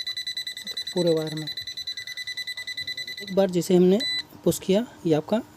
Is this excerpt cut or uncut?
cut